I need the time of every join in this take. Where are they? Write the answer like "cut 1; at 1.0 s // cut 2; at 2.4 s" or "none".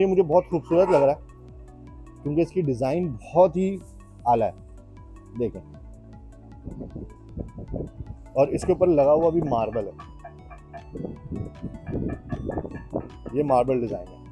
none